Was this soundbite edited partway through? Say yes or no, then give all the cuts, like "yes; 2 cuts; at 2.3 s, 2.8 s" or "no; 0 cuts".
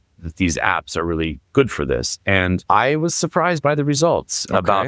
yes; 1 cut; at 2.6 s